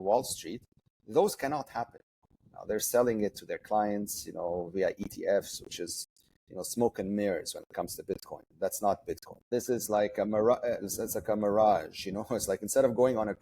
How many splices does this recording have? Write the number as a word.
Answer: two